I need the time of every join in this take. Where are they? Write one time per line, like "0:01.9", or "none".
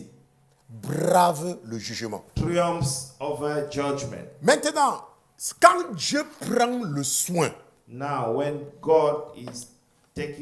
none